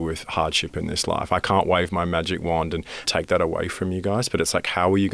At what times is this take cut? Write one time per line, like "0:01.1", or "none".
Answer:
0:03.0